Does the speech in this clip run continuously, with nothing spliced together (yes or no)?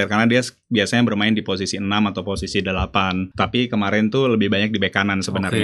no